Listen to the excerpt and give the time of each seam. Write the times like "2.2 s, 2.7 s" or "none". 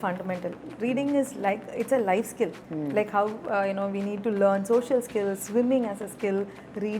2.6 s